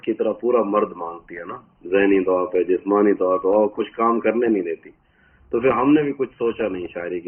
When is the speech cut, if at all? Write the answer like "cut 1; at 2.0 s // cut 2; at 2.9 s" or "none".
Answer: none